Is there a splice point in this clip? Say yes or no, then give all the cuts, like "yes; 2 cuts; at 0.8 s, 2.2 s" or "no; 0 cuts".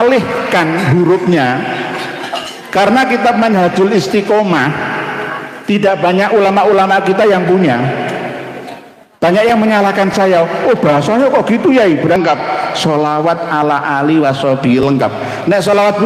yes; 1 cut; at 12.2 s